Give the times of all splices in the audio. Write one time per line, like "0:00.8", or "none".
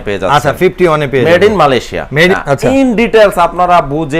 0:02.4